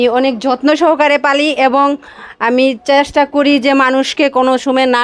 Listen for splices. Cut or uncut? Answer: uncut